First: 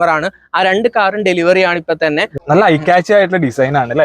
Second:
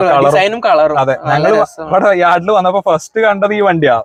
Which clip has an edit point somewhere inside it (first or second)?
first